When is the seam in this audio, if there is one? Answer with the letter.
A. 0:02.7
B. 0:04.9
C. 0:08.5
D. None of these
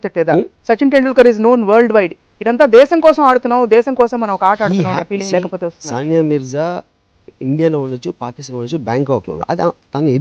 D